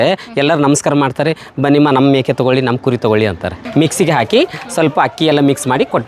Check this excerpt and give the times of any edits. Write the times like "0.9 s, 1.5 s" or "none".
3.6 s